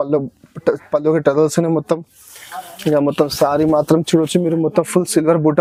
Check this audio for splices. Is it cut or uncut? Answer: uncut